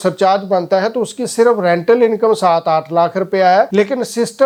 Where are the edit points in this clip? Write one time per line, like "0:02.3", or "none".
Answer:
none